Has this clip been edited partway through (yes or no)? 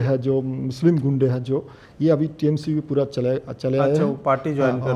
no